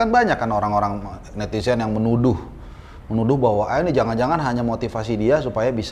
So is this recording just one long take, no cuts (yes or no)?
yes